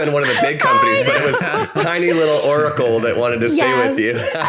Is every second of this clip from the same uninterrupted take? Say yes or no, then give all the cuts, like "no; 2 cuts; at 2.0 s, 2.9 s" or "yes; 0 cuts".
yes; 0 cuts